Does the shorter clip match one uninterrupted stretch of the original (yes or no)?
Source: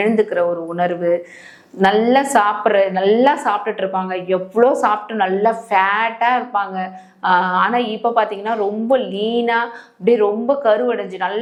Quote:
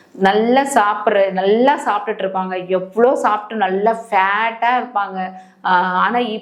yes